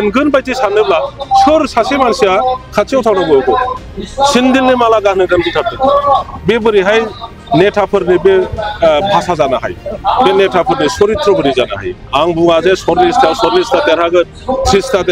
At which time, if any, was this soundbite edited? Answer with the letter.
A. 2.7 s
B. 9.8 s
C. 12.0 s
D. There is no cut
C